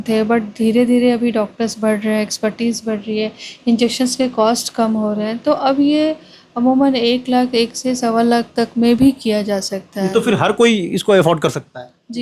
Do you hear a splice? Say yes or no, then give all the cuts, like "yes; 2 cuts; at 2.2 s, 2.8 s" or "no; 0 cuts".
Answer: no; 0 cuts